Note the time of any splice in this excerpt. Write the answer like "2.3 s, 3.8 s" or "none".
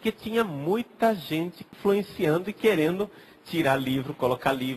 1.7 s